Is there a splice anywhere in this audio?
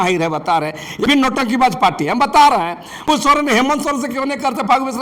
yes; 2 cuts; at 1.1 s, 3.0 s

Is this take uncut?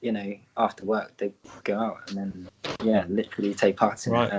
no; 1 cut; at 2.5 s

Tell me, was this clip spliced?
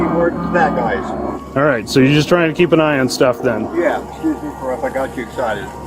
yes; 2 cuts; at 1.3 s, 4.0 s

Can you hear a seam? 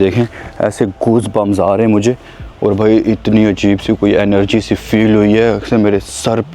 no; 0 cuts

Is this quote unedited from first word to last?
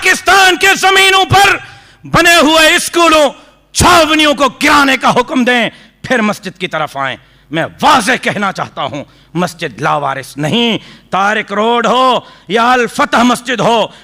yes; 0 cuts

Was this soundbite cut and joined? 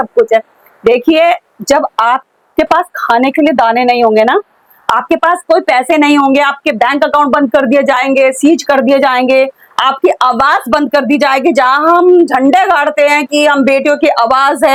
no; 0 cuts

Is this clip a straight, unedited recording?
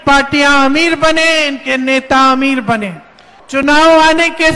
yes; 0 cuts

